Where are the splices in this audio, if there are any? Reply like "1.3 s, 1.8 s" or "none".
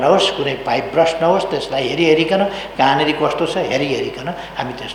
none